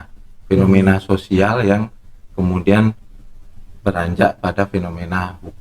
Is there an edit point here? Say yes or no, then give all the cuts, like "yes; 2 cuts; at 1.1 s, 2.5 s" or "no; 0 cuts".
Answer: no; 0 cuts